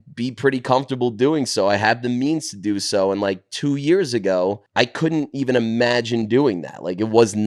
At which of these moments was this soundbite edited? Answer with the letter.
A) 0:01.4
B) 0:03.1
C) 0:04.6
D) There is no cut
C